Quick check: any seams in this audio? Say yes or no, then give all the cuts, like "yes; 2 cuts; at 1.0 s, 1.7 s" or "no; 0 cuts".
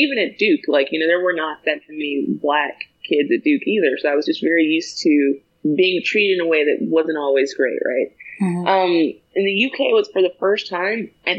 yes; 2 cuts; at 5.5 s, 9.2 s